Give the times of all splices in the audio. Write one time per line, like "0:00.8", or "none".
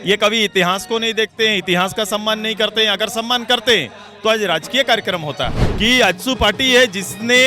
0:05.6